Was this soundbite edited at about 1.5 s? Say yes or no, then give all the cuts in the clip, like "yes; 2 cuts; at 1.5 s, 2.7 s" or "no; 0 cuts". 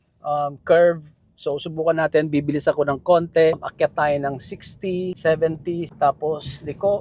no; 3 cuts; at 3.7 s, 5.2 s, 5.9 s